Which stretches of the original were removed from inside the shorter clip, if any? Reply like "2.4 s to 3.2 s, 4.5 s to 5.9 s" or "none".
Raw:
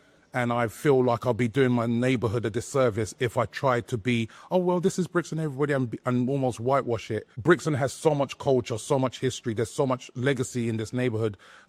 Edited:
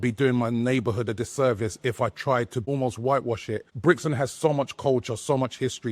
4.0 s to 6.3 s